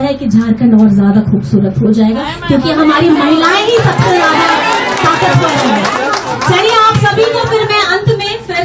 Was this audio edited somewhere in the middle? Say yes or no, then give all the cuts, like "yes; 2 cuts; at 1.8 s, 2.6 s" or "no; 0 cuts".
no; 0 cuts